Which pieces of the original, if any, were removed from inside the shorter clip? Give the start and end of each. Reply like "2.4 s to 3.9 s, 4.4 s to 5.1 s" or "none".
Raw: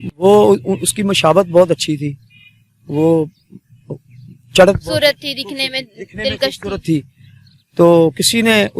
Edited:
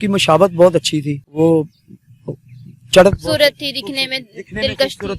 2.2 s to 2.9 s